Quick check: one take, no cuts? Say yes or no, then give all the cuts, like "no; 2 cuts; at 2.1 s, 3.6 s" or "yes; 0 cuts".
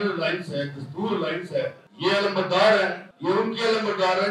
no; 2 cuts; at 1.8 s, 3.1 s